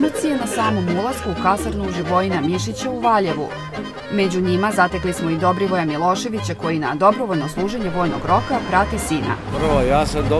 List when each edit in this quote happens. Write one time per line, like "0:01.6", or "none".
none